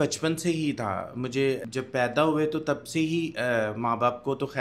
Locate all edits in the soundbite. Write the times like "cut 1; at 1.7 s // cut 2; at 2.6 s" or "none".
cut 1; at 1.6 s